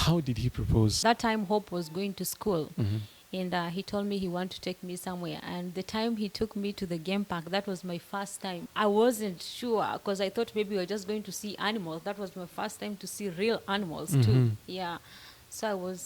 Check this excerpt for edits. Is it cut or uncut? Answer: cut